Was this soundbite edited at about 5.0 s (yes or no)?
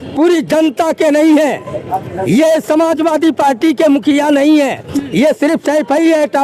no